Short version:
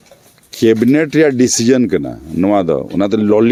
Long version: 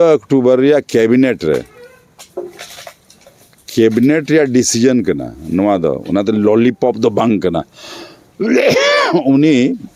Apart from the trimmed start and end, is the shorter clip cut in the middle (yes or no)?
no